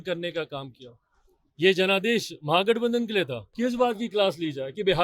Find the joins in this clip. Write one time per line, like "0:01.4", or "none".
0:03.4